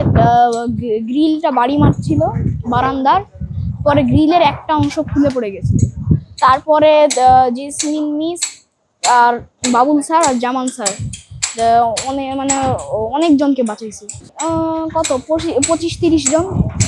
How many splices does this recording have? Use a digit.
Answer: 0